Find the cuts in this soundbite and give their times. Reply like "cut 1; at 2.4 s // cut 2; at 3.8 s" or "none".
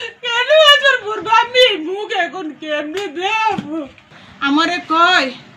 cut 1; at 4.1 s